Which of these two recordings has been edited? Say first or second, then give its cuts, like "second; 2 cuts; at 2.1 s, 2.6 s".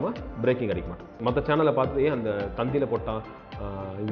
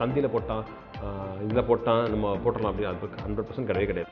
first; 1 cut; at 1.1 s